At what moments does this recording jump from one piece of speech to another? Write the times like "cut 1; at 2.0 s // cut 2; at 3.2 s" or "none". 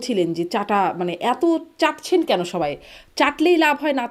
none